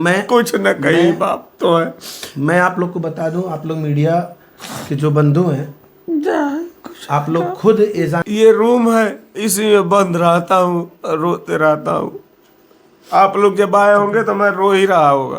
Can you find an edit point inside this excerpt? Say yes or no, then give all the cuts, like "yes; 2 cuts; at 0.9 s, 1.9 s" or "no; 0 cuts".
yes; 1 cut; at 8.2 s